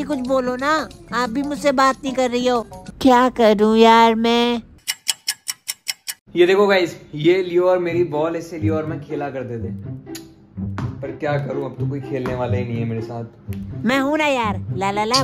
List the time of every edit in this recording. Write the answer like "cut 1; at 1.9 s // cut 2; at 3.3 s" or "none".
none

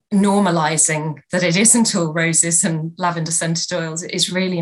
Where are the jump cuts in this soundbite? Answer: cut 1; at 1.2 s

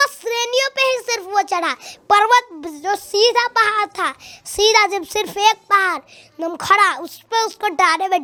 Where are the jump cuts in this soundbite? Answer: none

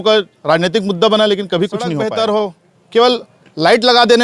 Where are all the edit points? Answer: cut 1; at 2.0 s

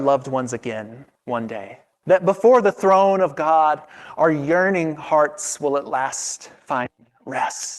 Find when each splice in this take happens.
cut 1; at 1.1 s // cut 2; at 1.8 s

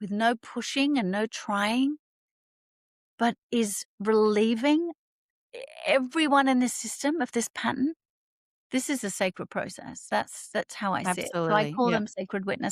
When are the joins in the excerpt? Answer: none

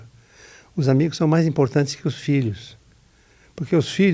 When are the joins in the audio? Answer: none

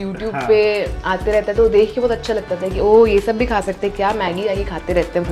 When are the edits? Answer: none

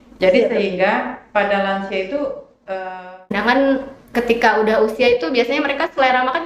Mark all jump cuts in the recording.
cut 1; at 3.3 s

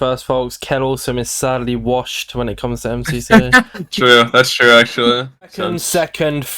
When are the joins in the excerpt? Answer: cut 1; at 3.7 s // cut 2; at 5.6 s

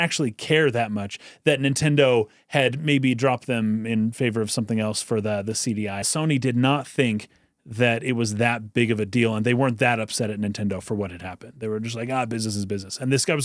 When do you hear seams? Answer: cut 1; at 6.1 s

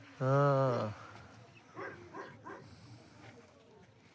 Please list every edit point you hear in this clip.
none

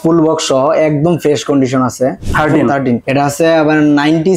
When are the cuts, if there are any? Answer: cut 1; at 2.2 s // cut 2; at 3.0 s

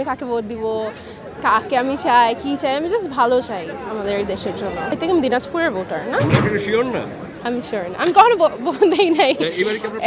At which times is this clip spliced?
none

